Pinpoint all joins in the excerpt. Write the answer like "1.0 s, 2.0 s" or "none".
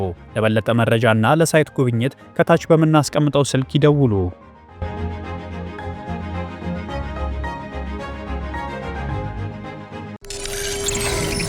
10.2 s